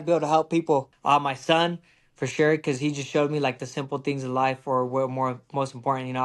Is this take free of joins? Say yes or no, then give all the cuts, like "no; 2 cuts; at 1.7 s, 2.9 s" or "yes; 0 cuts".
no; 1 cut; at 0.9 s